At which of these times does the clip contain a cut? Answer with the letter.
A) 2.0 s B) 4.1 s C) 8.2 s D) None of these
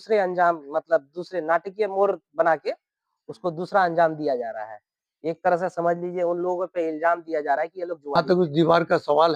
C